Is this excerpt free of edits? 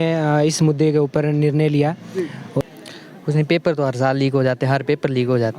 no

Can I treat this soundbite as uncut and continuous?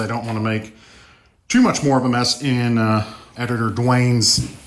no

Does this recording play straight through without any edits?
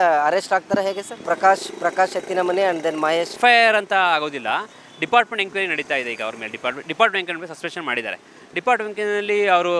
no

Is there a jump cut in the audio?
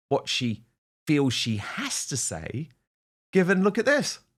no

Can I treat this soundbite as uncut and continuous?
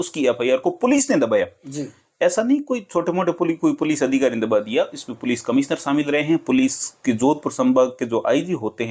yes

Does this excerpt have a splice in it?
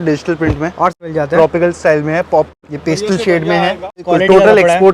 yes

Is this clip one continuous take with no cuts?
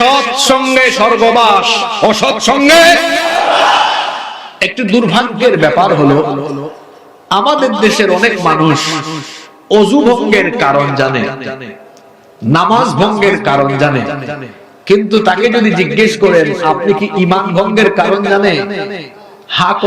no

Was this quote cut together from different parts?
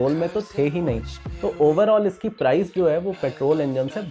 no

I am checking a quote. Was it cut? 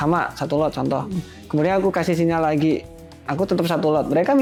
no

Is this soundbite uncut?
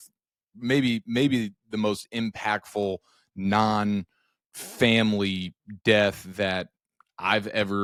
yes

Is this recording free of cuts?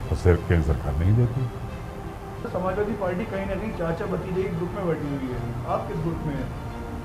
no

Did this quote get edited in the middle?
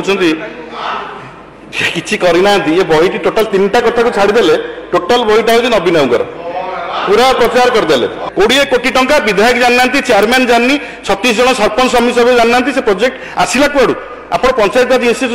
yes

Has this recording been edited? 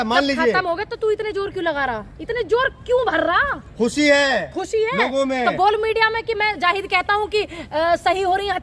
no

